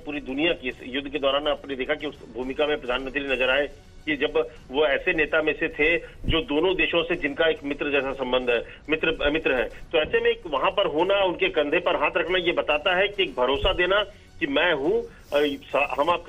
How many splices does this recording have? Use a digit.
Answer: 1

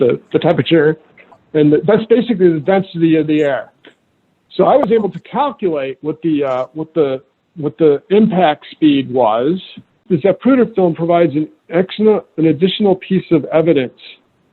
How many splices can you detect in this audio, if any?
1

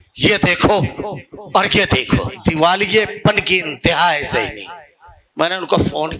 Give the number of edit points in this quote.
1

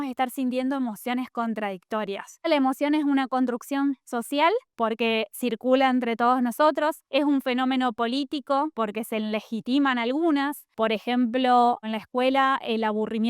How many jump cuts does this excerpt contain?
5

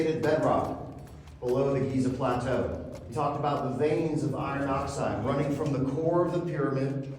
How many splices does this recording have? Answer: 1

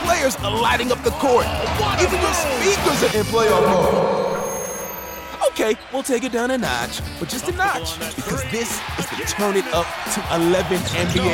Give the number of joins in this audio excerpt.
0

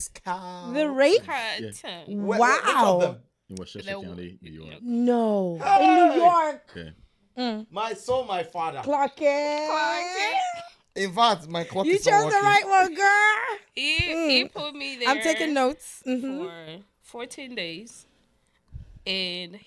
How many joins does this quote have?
0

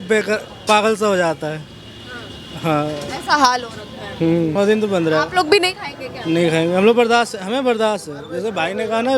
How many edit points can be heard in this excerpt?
1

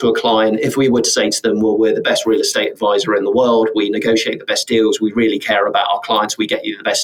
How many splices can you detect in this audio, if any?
0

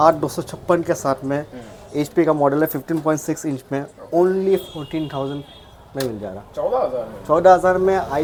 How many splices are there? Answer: 0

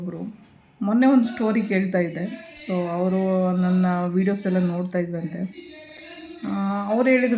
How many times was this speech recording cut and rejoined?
0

